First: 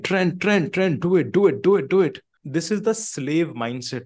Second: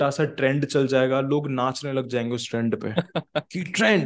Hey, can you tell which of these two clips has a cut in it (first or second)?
first